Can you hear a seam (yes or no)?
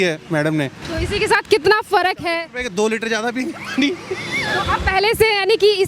no